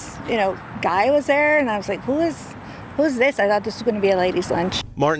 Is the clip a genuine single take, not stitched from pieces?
yes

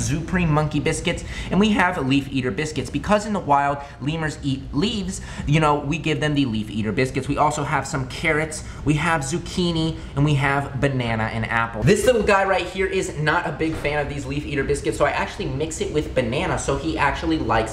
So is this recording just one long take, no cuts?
yes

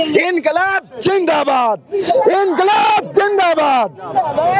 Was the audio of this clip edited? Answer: no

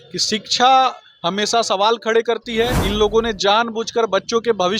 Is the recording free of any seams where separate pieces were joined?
no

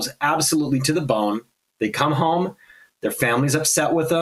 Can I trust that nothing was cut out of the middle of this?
yes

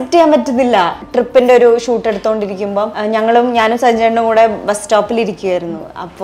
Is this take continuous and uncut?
no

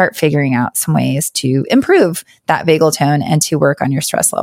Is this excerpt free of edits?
no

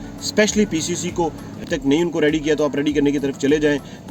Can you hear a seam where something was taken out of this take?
yes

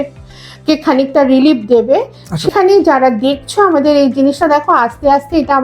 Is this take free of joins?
yes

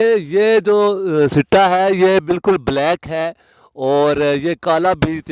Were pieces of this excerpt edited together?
no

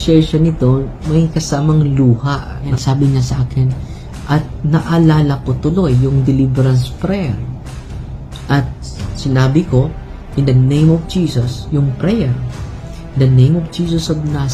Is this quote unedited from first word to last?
no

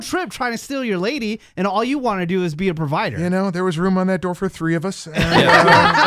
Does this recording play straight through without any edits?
no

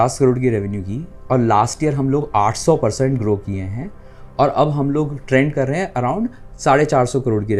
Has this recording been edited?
no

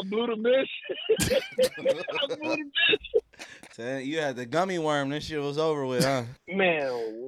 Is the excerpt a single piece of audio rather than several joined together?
no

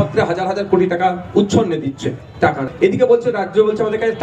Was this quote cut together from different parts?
yes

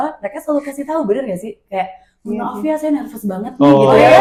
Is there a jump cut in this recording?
no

